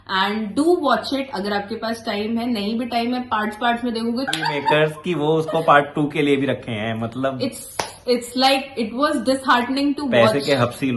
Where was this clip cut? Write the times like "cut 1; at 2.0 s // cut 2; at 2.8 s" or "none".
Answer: cut 1; at 4.3 s